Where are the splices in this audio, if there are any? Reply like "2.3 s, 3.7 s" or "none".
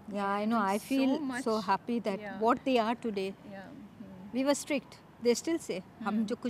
none